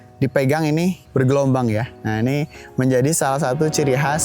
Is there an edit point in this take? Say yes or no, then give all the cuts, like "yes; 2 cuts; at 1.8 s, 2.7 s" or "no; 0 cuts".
yes; 2 cuts; at 1.0 s, 1.9 s